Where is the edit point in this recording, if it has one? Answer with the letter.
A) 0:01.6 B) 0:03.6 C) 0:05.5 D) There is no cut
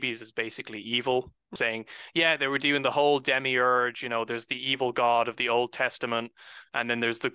A